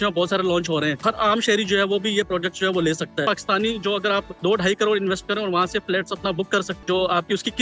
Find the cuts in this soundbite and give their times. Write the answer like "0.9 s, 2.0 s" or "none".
1.0 s, 3.2 s, 4.3 s, 6.7 s